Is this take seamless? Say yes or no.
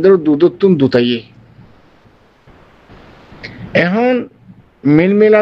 yes